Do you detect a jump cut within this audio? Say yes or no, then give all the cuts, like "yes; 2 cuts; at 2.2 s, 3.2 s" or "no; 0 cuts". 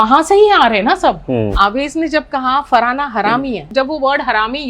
yes; 2 cuts; at 1.5 s, 3.6 s